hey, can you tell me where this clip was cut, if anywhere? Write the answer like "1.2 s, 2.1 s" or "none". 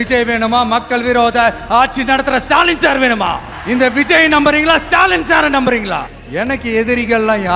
3.5 s, 6.2 s